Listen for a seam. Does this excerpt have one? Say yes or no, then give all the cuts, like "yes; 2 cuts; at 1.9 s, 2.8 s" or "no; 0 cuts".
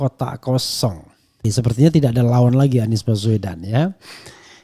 yes; 1 cut; at 1.4 s